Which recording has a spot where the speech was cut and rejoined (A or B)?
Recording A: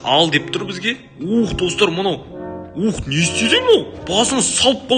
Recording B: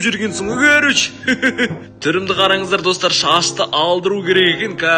B